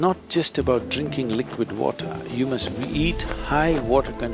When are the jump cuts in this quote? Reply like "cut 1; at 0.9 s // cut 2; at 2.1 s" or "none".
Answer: none